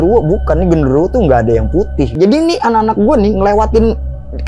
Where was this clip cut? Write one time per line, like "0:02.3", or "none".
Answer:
0:02.1

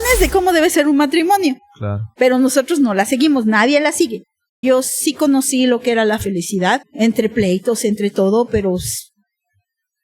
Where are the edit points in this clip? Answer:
0:04.6
0:06.9

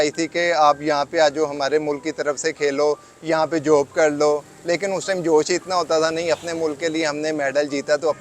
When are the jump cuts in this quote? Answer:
none

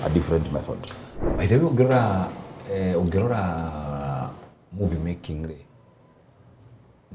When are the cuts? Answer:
none

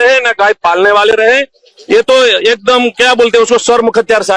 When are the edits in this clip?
none

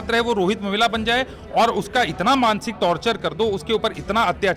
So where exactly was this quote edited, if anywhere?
none

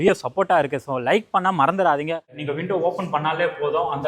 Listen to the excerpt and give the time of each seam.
0:02.4

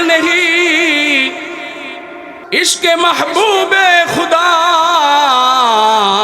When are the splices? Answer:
0:02.3

